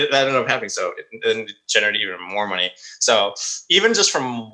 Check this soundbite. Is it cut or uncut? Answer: uncut